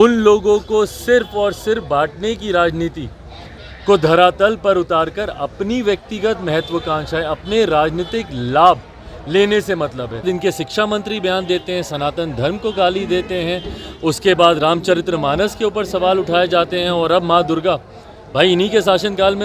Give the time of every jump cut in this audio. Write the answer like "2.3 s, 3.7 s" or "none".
10.3 s